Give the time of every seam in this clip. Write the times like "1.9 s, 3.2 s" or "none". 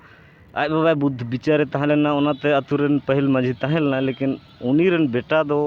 none